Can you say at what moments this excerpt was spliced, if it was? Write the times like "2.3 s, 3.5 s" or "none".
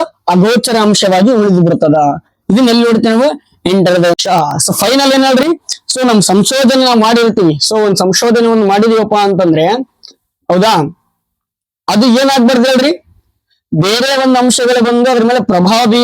4.2 s